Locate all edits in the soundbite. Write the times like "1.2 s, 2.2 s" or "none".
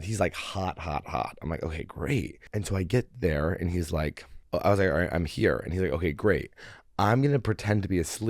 2.4 s, 4.4 s